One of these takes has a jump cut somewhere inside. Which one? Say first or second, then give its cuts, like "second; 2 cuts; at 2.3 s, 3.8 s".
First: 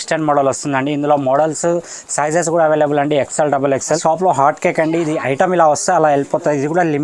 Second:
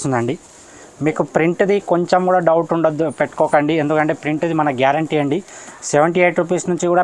first; 1 cut; at 4.0 s